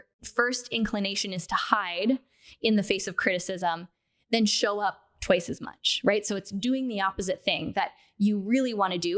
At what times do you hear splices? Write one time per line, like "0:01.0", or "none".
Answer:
none